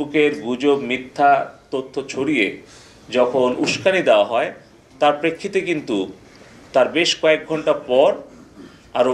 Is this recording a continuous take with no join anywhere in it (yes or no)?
yes